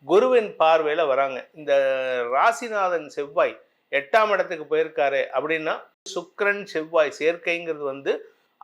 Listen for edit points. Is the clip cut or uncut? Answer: cut